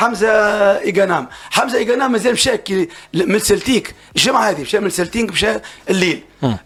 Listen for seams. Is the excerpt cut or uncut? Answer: uncut